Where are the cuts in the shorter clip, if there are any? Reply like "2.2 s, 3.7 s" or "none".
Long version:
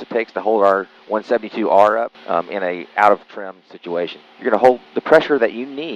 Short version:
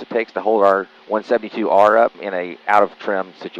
2.2 s